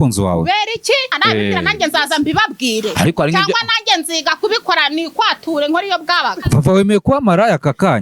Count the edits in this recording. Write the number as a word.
two